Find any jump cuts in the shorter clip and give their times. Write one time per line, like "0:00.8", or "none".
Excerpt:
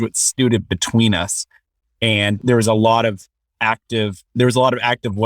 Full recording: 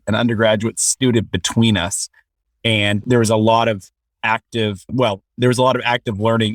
0:04.2